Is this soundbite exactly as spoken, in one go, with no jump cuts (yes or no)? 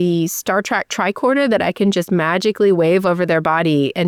yes